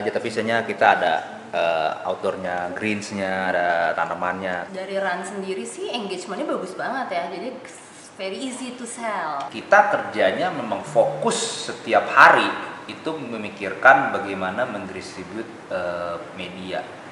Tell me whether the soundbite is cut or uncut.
cut